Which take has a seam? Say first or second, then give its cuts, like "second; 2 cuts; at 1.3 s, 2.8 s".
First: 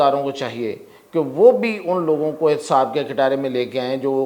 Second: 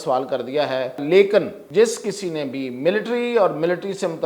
second; 2 cuts; at 1.0 s, 1.6 s